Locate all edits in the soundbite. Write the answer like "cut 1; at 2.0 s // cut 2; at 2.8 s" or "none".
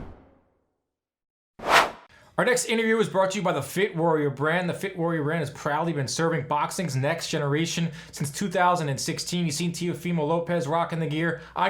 cut 1; at 1.8 s